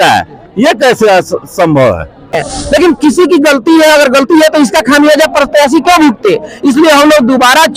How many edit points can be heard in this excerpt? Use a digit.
1